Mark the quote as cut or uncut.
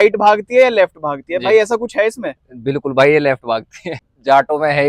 cut